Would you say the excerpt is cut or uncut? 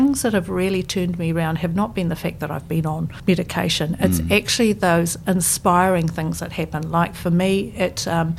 uncut